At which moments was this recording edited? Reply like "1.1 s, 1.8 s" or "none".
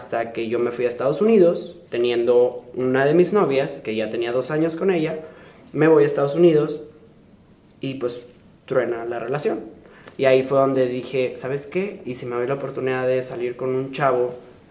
none